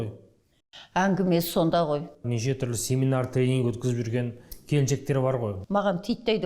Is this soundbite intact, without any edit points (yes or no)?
no